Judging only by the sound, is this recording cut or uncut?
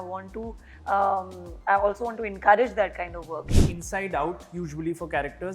cut